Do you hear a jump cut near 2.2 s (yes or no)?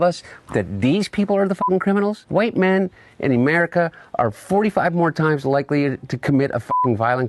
yes